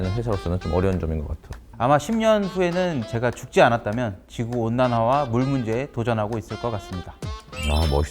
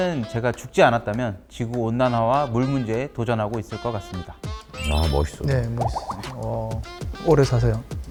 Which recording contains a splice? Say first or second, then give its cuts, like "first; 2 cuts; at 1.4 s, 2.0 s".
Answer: first; 1 cut; at 1.6 s